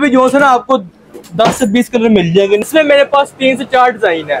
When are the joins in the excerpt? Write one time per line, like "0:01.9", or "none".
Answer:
0:02.7

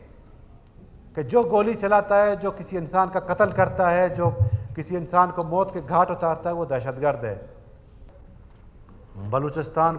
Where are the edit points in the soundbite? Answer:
0:08.0

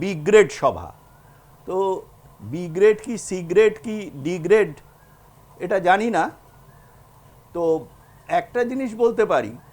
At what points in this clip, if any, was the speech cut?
none

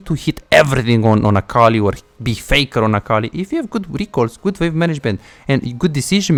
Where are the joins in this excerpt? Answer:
none

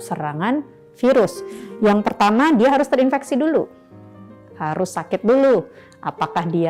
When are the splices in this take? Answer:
none

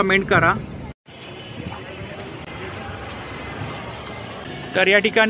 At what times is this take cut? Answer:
0:00.9
0:02.4
0:04.5

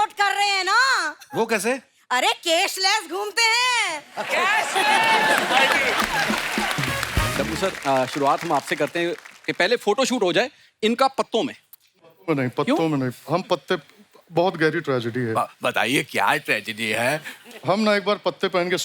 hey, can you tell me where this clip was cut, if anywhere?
0:07.3

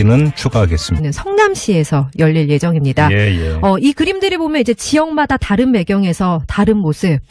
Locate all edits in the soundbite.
none

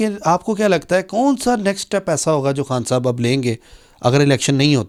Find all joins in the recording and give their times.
none

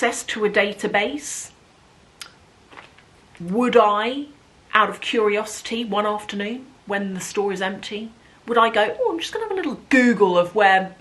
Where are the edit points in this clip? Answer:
none

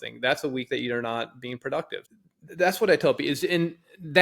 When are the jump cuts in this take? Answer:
0:02.0

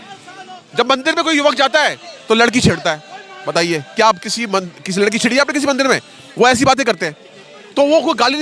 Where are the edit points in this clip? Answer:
none

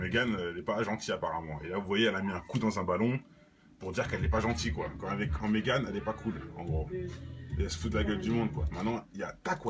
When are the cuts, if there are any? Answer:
none

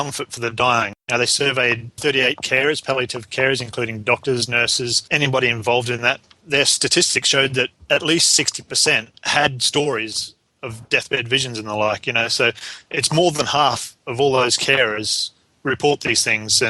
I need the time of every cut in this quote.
0:01.0
0:02.0
0:05.1
0:06.4
0:07.8
0:09.2

